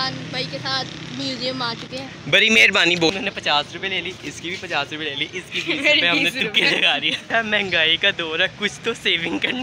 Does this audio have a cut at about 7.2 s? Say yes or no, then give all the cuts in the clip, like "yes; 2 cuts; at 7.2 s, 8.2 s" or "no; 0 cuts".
yes; 2 cuts; at 3.1 s, 7.2 s